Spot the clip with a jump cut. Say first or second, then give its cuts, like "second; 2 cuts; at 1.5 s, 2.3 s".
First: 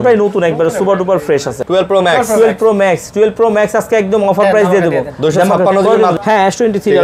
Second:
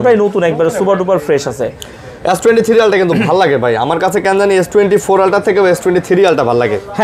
first; 2 cuts; at 1.6 s, 6.1 s